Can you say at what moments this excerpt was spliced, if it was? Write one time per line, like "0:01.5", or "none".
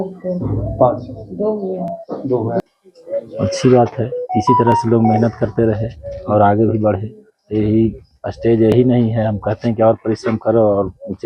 0:02.6